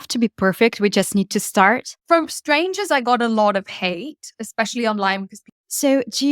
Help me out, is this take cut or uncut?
cut